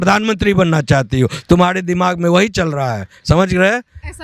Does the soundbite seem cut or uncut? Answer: uncut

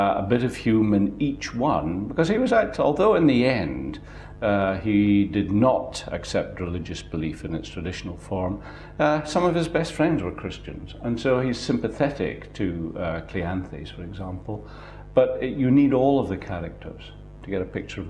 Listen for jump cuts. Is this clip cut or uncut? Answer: cut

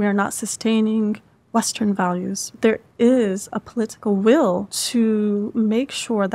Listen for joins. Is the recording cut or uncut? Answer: cut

